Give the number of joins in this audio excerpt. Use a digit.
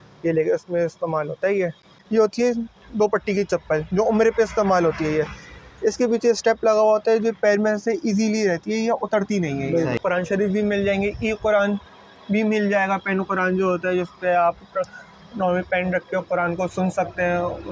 2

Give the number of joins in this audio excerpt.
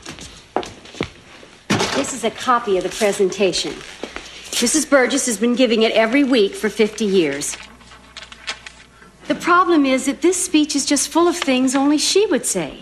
1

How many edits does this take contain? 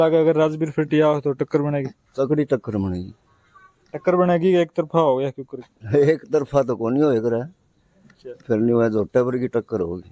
0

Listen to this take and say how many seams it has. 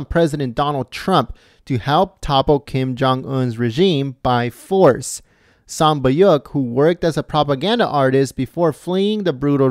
0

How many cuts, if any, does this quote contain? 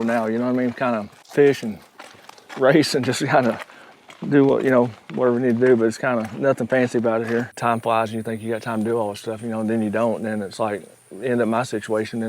2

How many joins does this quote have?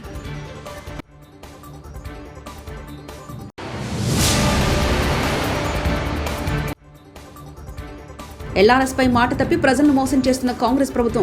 1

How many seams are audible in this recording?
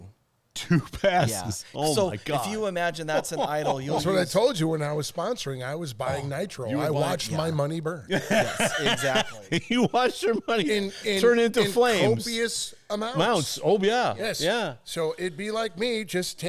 0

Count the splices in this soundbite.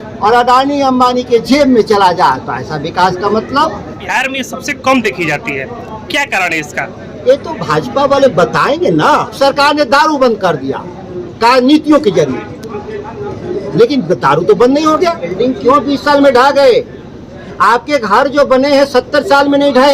3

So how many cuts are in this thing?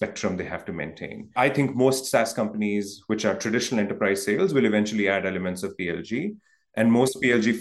1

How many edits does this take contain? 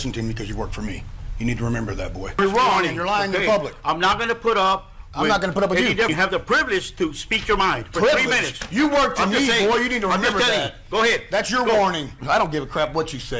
3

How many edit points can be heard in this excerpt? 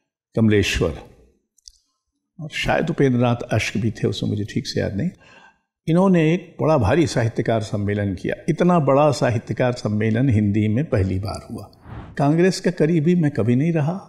1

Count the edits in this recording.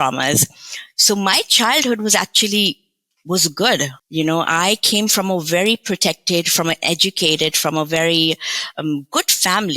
1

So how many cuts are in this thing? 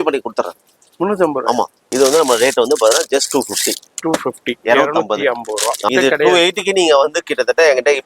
2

